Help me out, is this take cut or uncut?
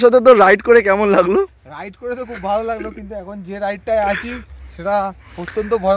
uncut